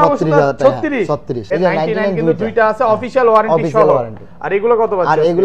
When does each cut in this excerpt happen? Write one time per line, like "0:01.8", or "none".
0:01.5